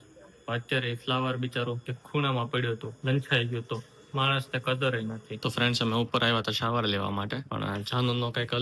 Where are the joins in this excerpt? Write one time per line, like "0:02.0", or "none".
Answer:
0:01.9
0:02.9
0:05.5